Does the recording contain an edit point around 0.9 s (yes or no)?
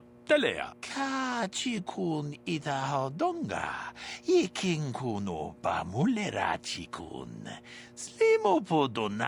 no